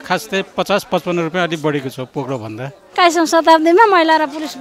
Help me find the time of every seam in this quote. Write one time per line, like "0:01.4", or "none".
0:02.8